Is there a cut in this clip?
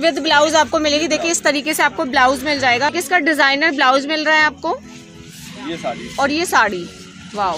yes; 1 cut; at 2.9 s

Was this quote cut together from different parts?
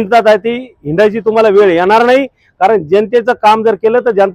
no; 0 cuts

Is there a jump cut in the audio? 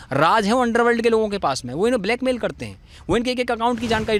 no; 0 cuts

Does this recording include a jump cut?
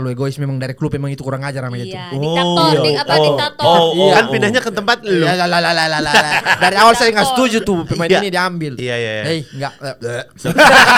no; 0 cuts

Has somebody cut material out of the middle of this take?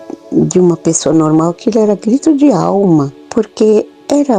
yes; 1 cut; at 3.2 s

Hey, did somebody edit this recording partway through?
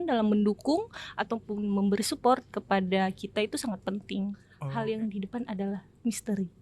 yes; 1 cut; at 4.5 s

